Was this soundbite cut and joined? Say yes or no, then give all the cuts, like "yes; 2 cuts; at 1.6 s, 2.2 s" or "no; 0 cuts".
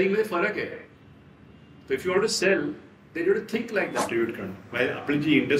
yes; 1 cut; at 4.1 s